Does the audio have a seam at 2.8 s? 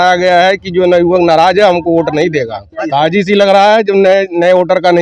yes; 1 cut; at 2.8 s

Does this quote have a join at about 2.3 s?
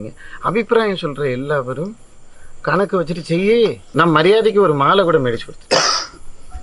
no; 1 cut; at 3.9 s

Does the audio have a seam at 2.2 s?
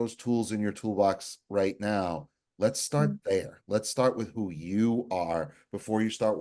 no; 0 cuts

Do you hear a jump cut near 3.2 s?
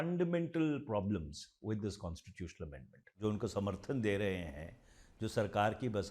yes; 1 cut; at 3.2 s

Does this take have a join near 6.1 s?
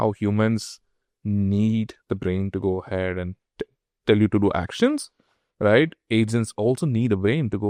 no; 0 cuts

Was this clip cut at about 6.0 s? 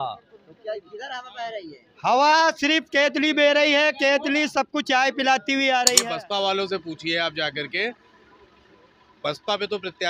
yes; 1 cut; at 6.0 s

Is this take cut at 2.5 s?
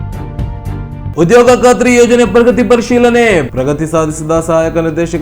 no; 1 cut; at 1.1 s

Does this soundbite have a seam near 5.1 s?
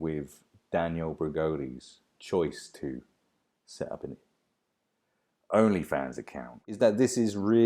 no; 1 cut; at 6.6 s

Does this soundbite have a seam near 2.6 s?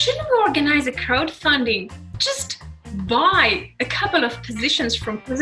no; 0 cuts

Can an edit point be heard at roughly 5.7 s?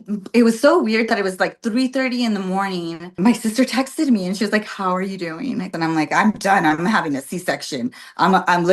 yes; 2 cuts; at 3.2 s, 5.7 s

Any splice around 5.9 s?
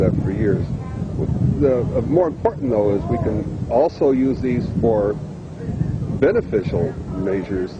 yes; 1 cut; at 5.9 s

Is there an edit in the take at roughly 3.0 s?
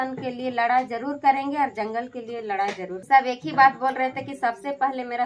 yes; 1 cut; at 3.0 s

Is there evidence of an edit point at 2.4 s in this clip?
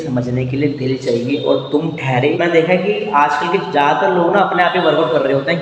yes; 1 cut; at 2.4 s

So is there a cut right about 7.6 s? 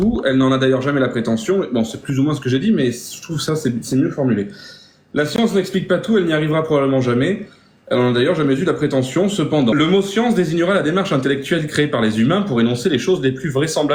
no; 0 cuts

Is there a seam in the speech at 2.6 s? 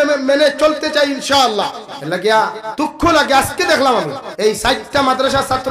yes; 3 cuts; at 1.9 s, 2.6 s, 4.2 s

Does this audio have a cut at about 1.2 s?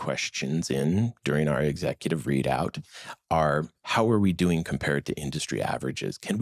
no; 0 cuts

